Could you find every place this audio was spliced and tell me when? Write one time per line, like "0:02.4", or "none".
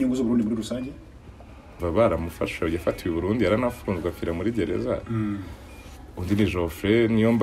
0:01.8